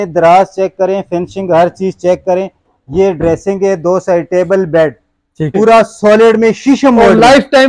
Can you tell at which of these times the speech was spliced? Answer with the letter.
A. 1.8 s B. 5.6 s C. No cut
B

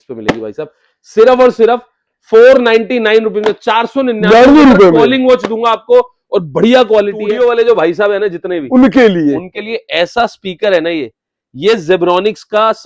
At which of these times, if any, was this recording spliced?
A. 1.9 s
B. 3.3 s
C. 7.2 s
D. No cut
C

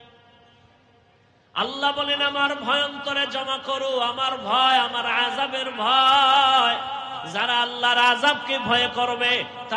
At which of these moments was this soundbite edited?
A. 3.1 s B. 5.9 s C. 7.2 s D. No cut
C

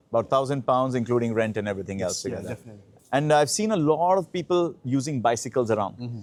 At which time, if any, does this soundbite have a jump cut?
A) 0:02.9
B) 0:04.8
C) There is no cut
C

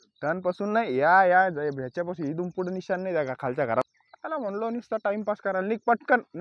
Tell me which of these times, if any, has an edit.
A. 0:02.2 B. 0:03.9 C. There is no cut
B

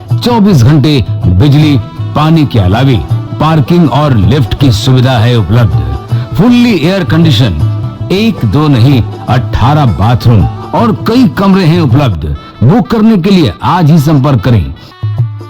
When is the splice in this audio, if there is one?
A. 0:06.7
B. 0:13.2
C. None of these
C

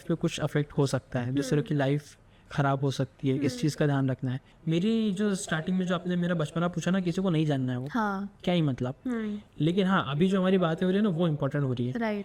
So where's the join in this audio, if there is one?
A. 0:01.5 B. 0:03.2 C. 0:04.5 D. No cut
C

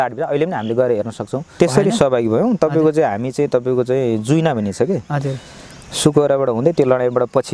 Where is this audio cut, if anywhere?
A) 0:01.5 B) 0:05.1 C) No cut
A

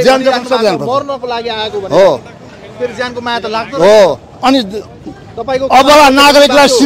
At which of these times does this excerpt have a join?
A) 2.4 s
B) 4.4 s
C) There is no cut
C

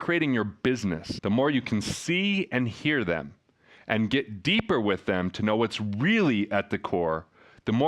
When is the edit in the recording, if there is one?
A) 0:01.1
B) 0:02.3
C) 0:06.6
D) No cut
A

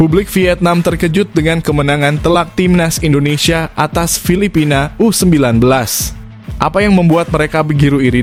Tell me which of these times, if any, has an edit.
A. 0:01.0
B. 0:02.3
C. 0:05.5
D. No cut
D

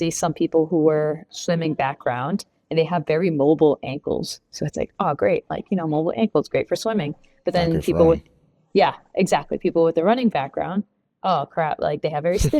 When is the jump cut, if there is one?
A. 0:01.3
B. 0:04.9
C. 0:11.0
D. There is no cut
A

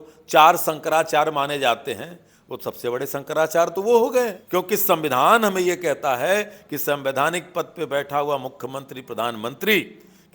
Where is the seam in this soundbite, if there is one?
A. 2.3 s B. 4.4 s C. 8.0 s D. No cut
B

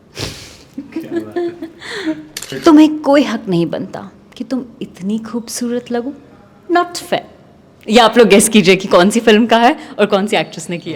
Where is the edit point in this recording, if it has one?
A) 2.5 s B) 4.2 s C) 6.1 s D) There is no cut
A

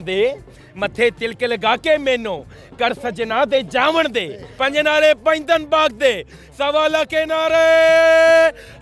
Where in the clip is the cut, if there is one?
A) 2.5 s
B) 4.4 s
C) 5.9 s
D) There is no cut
B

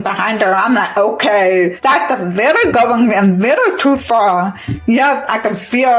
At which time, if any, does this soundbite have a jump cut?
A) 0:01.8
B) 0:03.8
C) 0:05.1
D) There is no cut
A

